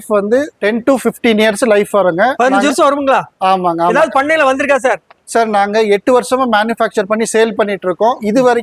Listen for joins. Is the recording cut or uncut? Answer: uncut